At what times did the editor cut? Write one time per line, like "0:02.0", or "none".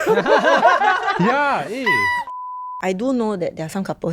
0:02.7